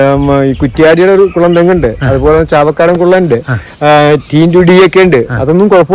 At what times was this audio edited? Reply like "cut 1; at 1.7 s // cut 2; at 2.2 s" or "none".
none